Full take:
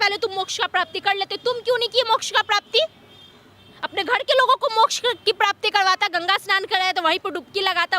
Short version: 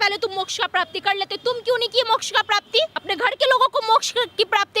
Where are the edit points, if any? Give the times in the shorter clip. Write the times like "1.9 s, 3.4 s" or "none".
3.0 s